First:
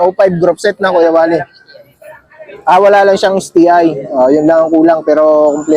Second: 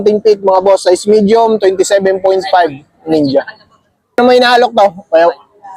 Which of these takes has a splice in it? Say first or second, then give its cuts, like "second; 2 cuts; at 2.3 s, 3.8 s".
second; 1 cut; at 4.2 s